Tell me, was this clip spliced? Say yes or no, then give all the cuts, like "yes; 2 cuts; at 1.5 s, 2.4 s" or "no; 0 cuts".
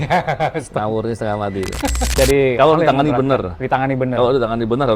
yes; 1 cut; at 2.1 s